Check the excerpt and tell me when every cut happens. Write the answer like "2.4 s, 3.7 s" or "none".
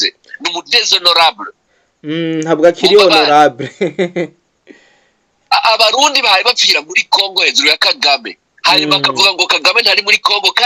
none